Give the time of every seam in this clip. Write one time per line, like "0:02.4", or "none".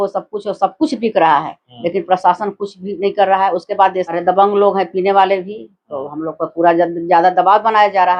0:04.2